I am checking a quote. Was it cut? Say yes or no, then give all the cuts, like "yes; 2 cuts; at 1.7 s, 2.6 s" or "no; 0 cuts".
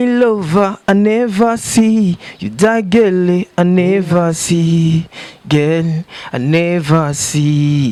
no; 0 cuts